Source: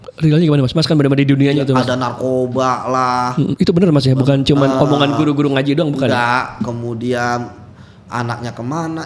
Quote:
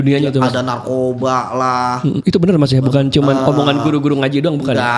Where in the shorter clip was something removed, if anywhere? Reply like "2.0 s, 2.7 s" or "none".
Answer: none